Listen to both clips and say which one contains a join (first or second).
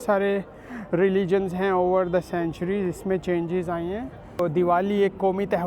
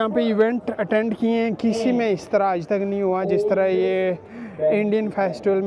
first